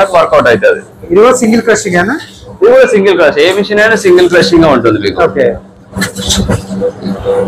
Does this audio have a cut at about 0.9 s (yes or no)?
no